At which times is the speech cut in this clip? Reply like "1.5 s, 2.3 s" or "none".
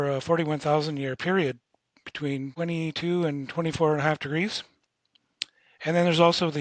2.5 s